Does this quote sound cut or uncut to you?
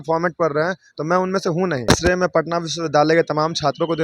cut